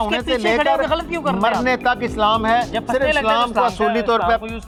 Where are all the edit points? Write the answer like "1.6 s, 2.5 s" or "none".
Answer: none